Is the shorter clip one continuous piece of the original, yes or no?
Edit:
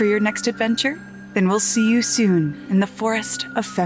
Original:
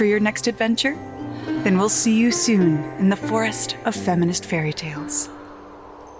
no